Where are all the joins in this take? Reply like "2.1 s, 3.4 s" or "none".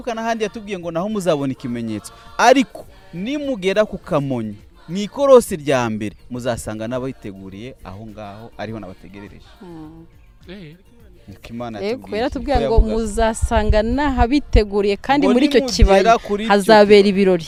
none